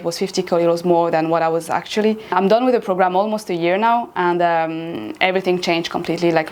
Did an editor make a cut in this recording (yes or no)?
no